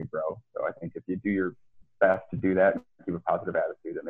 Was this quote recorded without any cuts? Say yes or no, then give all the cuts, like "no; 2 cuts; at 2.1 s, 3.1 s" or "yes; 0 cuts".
yes; 0 cuts